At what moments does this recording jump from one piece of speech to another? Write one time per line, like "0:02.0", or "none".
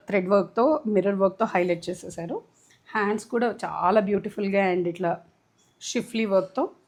none